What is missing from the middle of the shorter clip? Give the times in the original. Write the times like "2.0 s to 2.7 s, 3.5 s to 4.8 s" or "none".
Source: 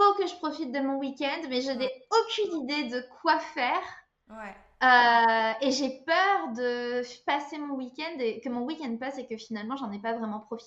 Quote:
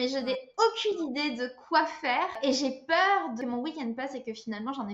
3.9 s to 5.5 s, 6.6 s to 8.4 s